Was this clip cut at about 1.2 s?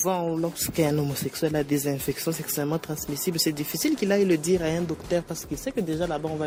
no; 0 cuts

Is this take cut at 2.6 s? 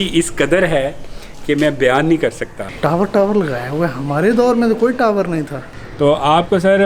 yes; 2 cuts; at 2.6 s, 5.6 s

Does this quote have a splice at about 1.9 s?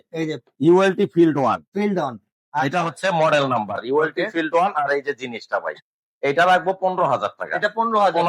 no; 0 cuts

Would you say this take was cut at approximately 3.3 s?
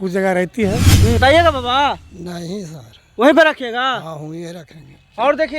no; 1 cut; at 1.2 s

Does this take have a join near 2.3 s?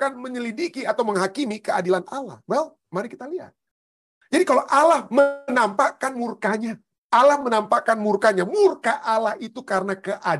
no; 1 cut; at 3.7 s

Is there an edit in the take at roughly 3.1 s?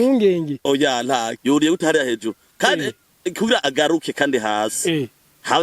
no; 1 cut; at 1.3 s

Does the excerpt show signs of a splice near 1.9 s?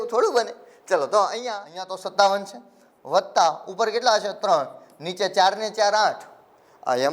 yes; 1 cut; at 1.9 s

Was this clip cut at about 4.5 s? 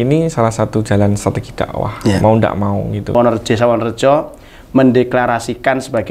no; 1 cut; at 3.1 s

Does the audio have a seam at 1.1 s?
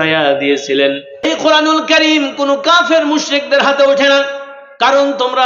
yes; 1 cut; at 1.1 s

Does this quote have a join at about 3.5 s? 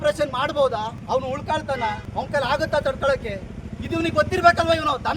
no; 2 cuts; at 1.0 s, 2.0 s

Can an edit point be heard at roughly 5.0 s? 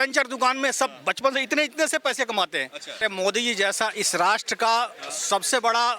no; 1 cut; at 3.0 s

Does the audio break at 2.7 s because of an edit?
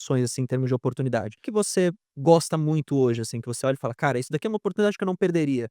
no; 1 cut; at 1.4 s

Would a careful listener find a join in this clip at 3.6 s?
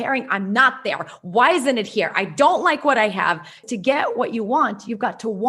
yes; 1 cut; at 3.6 s

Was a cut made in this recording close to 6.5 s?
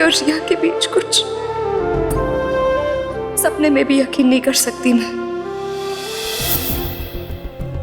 yes; 1 cut; at 6.5 s

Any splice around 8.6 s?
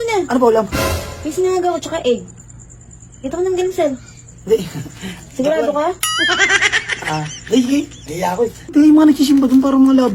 yes; 1 cut; at 8.6 s

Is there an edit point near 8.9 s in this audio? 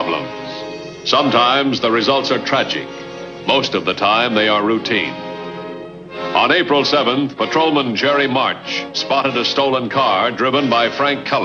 no; 0 cuts

